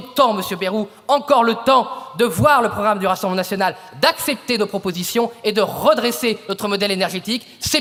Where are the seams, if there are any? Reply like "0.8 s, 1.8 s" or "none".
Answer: none